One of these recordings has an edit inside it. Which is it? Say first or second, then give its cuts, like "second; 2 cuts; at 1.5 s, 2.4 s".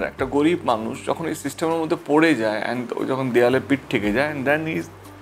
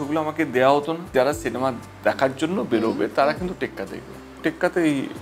second; 2 cuts; at 1.1 s, 4.4 s